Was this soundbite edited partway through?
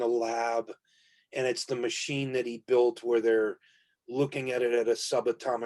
no; 0 cuts

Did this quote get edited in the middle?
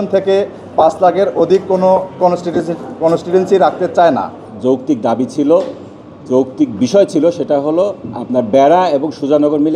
yes; 1 cut; at 4.5 s

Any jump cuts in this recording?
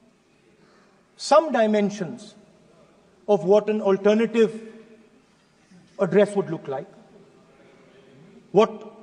no; 0 cuts

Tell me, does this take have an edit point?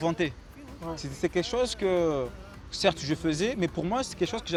no; 0 cuts

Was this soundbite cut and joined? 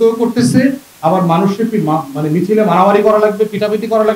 no; 0 cuts

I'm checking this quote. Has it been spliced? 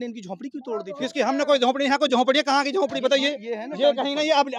no; 0 cuts

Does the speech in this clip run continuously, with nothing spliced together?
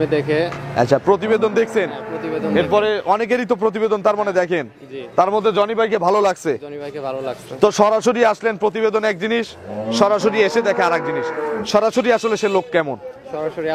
yes; 0 cuts

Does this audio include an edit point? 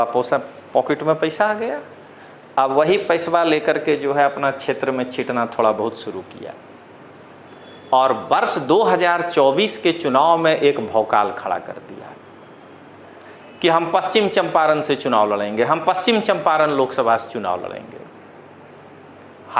no; 0 cuts

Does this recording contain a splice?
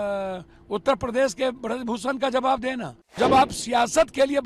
yes; 1 cut; at 3.2 s

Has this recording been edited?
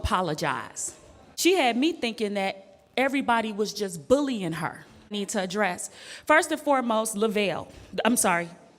yes; 2 cuts; at 1.2 s, 5.1 s

